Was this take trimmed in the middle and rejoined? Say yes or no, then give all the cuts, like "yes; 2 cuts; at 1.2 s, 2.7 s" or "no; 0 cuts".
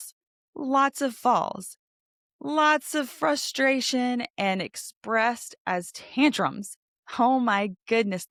no; 0 cuts